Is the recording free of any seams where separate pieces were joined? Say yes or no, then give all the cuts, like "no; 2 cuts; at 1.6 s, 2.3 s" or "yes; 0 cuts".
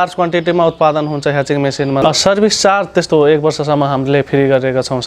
no; 1 cut; at 2.0 s